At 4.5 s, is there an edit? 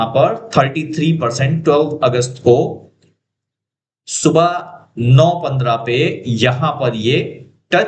no; 0 cuts

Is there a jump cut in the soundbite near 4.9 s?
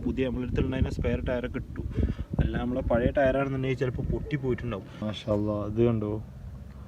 yes; 1 cut; at 4.9 s

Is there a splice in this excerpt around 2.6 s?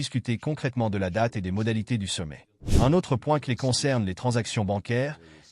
yes; 1 cut; at 2.6 s

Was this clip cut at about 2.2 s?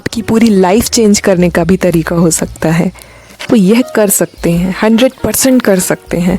no; 1 cut; at 3.4 s

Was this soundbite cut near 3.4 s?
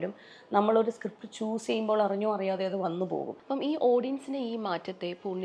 yes; 1 cut; at 3.4 s

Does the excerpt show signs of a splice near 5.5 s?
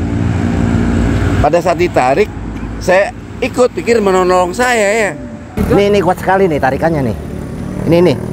yes; 1 cut; at 5.5 s

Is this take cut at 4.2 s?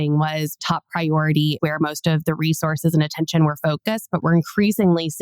yes; 1 cut; at 4.2 s

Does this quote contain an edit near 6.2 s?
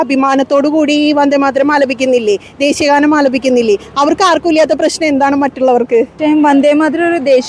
yes; 1 cut; at 6.2 s

